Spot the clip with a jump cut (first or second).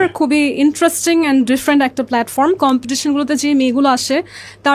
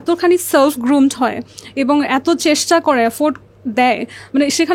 first